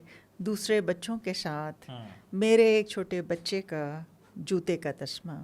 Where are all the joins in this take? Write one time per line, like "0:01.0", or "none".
none